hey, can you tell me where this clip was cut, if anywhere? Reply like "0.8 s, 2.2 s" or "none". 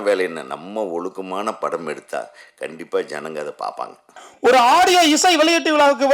4.3 s